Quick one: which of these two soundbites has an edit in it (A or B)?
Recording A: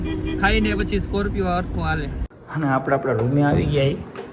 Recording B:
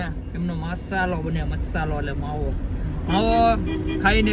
A